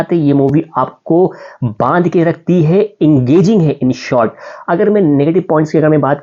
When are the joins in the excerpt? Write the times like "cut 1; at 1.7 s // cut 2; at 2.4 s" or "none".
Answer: none